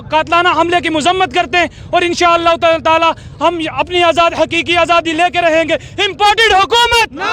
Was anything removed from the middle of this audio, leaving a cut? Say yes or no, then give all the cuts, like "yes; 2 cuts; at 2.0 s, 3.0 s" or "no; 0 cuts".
no; 0 cuts